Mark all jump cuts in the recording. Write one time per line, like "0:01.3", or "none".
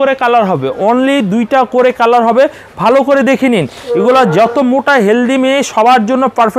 none